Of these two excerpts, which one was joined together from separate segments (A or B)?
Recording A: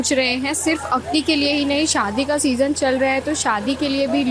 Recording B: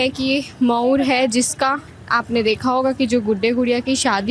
B